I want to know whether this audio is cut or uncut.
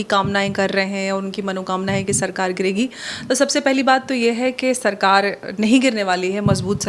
uncut